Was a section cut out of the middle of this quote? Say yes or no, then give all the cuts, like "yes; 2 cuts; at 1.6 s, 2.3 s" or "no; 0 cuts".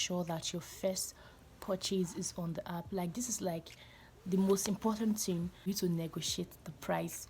yes; 1 cut; at 5.7 s